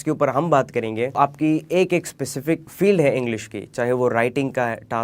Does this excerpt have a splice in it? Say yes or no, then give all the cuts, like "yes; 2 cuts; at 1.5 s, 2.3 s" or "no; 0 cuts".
yes; 2 cuts; at 1.2 s, 2.7 s